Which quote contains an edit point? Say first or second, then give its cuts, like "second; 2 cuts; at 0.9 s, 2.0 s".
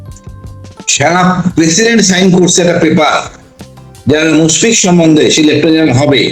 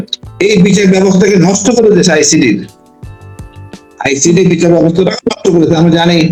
first; 1 cut; at 0.9 s